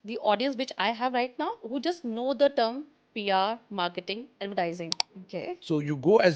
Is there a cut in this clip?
yes; 2 cuts; at 1.6 s, 5.1 s

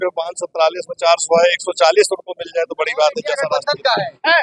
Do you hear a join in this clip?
yes; 1 cut; at 3.5 s

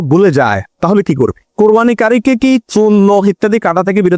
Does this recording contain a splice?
yes; 1 cut; at 1.4 s

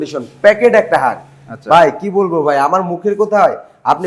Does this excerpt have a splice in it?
no; 0 cuts

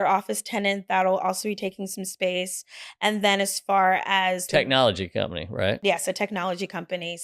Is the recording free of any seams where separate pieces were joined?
no; 1 cut; at 5.8 s

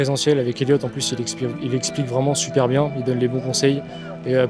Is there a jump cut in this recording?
no; 0 cuts

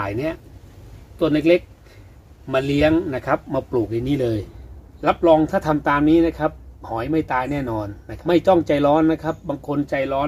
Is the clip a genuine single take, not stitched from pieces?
no; 2 cuts; at 4.6 s, 8.0 s

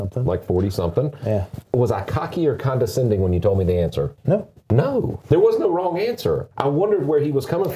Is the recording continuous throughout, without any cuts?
no; 4 cuts; at 1.6 s, 4.2 s, 5.2 s, 6.5 s

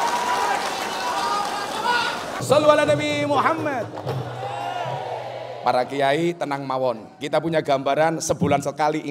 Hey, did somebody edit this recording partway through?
yes; 1 cut; at 2.3 s

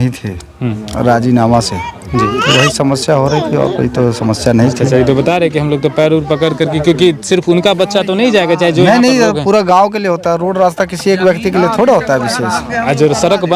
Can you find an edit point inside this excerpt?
no; 0 cuts

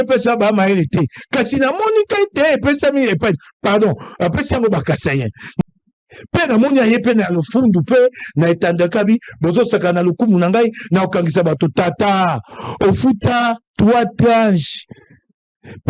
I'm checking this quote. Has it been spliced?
yes; 1 cut; at 5.6 s

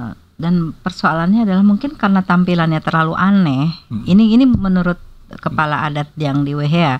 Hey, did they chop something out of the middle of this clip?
no; 0 cuts

